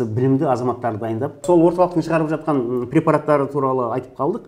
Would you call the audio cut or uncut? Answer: uncut